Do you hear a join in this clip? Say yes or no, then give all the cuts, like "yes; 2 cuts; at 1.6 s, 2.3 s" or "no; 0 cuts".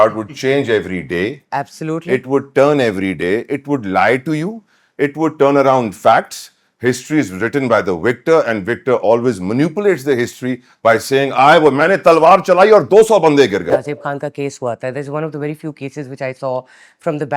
yes; 1 cut; at 13.8 s